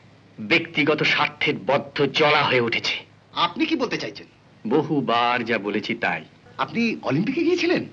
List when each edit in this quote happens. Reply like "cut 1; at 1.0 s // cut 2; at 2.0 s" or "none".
cut 1; at 6.4 s